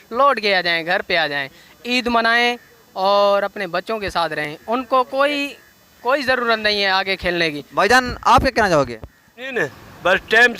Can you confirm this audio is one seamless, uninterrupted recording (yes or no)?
yes